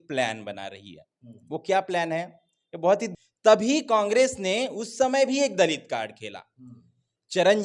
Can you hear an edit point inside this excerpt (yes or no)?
yes